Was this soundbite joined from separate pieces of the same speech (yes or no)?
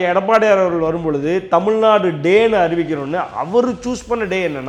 no